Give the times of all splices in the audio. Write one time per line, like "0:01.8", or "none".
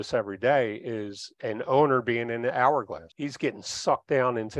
0:03.0